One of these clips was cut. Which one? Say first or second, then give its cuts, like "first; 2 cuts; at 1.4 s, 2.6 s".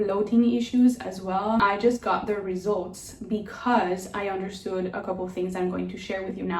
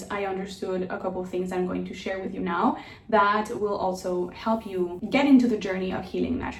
first; 1 cut; at 1.6 s